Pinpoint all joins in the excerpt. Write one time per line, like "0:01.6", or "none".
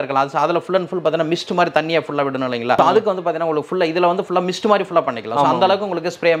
0:02.8